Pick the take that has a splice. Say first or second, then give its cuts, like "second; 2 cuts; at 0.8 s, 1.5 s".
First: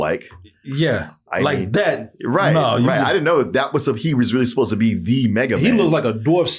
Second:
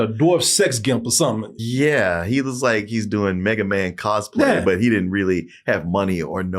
second; 1 cut; at 1.5 s